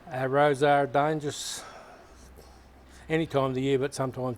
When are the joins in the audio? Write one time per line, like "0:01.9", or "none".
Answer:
none